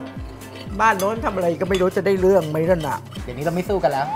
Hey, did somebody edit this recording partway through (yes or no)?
yes